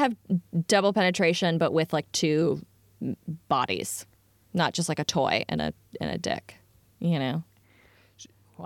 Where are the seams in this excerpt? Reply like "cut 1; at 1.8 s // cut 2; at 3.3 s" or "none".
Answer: none